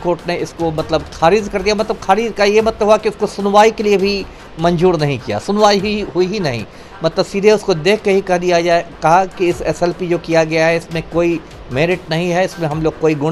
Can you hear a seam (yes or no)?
no